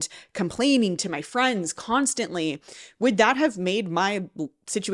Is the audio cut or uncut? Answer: uncut